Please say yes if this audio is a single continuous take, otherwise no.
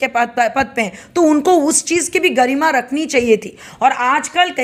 yes